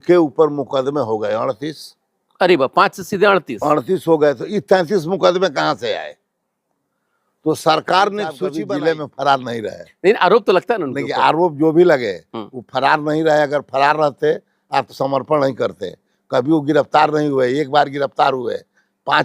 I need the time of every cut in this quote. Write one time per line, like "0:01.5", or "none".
0:08.5